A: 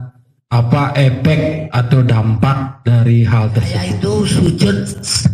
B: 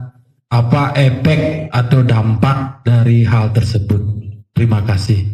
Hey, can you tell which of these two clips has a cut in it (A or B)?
A